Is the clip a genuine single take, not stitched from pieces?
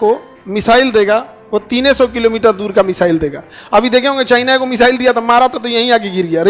yes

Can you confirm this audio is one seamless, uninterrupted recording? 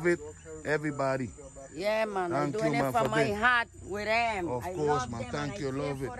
yes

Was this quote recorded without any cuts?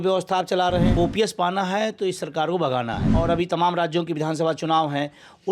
no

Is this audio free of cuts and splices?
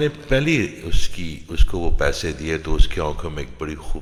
yes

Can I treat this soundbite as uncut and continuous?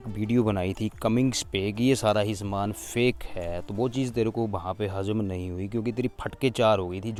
yes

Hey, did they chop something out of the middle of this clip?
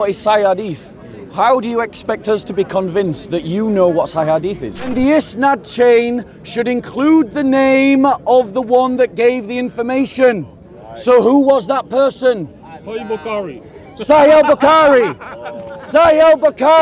yes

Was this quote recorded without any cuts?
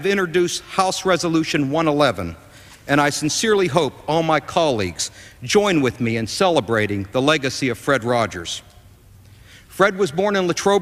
no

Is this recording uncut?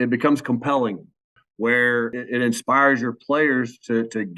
no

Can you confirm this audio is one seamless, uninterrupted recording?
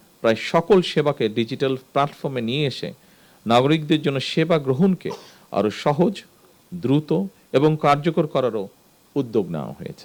yes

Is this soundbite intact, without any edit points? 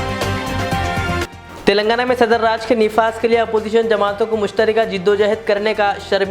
no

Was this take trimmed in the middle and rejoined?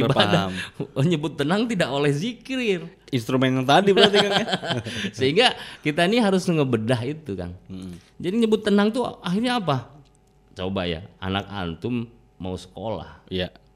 no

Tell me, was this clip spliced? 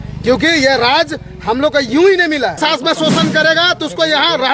yes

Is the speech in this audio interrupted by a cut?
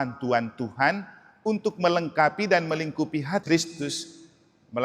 yes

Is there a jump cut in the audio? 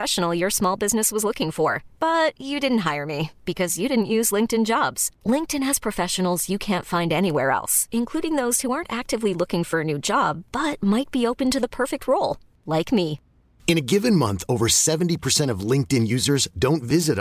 no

